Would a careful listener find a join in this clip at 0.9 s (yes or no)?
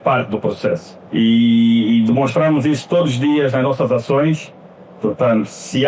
yes